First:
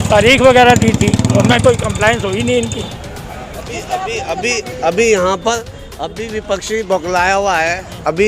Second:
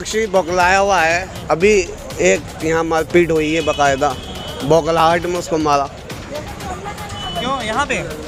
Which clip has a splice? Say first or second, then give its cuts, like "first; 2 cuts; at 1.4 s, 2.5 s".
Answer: first; 1 cut; at 2.8 s